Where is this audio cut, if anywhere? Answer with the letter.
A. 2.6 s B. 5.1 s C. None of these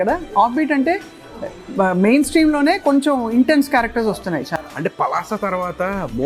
C